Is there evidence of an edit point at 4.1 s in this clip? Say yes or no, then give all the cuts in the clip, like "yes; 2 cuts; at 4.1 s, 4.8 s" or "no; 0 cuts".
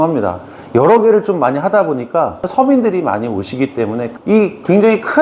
yes; 2 cuts; at 2.5 s, 4.1 s